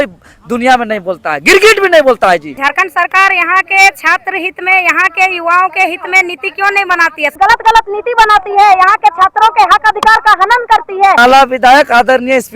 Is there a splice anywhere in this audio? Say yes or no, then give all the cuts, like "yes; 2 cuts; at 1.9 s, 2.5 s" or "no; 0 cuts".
yes; 3 cuts; at 2.6 s, 7.3 s, 11.2 s